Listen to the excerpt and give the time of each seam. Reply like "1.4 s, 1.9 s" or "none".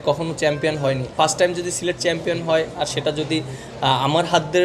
1.1 s